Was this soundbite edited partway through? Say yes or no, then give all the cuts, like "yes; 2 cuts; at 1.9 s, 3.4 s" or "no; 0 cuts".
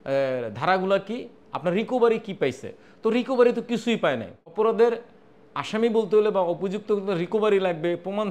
yes; 1 cut; at 4.4 s